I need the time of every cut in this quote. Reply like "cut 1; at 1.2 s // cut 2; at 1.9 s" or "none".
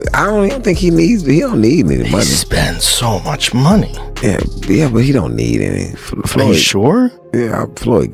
none